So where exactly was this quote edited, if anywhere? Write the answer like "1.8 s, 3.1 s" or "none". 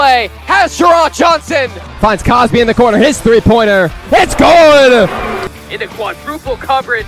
1.8 s, 5.6 s